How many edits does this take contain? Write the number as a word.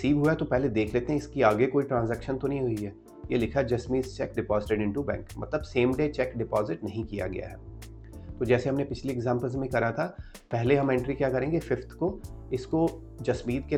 zero